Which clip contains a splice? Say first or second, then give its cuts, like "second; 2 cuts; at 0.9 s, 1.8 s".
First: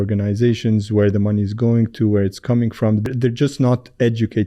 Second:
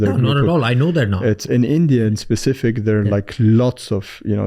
first; 1 cut; at 3.1 s